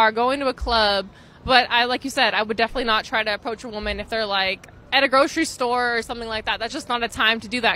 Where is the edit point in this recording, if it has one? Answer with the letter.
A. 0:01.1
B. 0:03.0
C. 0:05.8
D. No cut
D